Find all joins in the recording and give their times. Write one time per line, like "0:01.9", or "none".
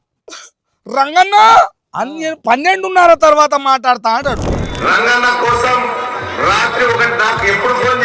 0:04.7